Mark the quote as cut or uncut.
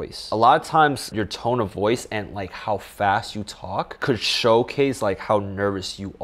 uncut